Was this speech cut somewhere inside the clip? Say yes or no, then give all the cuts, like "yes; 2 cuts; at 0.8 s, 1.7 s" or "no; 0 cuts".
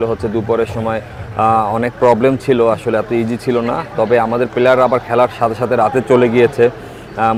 no; 0 cuts